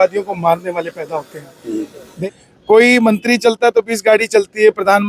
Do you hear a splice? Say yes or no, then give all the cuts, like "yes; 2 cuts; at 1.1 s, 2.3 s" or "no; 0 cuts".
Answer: yes; 1 cut; at 2.0 s